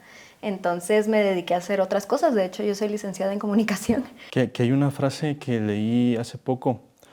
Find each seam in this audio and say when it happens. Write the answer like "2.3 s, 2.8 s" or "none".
4.2 s